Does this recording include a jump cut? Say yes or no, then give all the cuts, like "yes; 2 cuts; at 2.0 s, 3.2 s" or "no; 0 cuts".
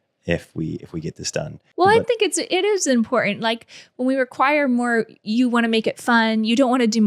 yes; 1 cut; at 1.6 s